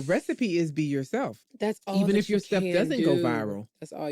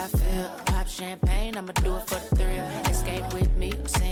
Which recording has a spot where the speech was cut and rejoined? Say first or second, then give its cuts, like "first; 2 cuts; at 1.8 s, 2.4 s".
first; 1 cut; at 1.4 s